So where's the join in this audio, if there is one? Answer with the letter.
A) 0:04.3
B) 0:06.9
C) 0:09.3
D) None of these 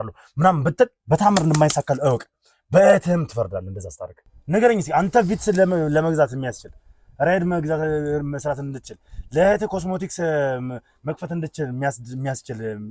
A